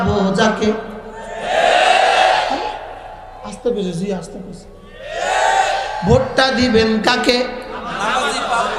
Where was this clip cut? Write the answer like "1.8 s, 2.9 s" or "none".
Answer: none